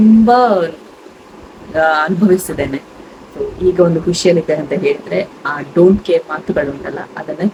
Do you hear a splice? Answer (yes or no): no